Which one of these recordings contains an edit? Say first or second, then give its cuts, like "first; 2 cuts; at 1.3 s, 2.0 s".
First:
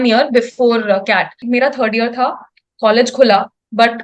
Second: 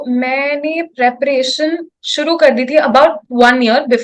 first; 1 cut; at 1.4 s